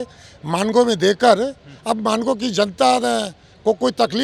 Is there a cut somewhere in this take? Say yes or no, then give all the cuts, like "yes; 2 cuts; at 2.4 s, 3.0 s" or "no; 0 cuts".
no; 0 cuts